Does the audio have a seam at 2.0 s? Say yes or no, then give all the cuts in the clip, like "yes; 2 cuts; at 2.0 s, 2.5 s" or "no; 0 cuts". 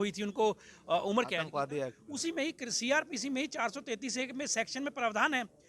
yes; 1 cut; at 2.0 s